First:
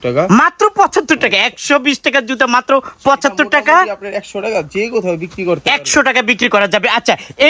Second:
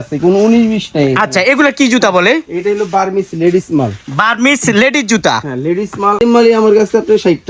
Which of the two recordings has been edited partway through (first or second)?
second